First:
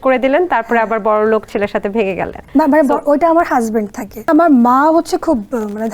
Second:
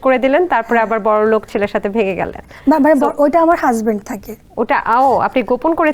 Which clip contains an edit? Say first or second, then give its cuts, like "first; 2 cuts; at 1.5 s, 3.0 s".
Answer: first; 2 cuts; at 2.3 s, 4.3 s